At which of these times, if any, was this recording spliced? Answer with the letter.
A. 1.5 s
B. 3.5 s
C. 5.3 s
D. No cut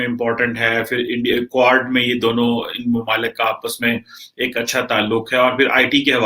D